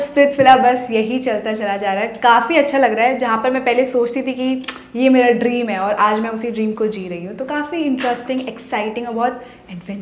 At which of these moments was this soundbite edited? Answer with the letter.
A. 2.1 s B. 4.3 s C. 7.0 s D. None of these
D